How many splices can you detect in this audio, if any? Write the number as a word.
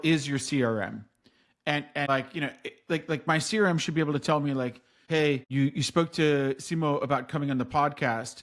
two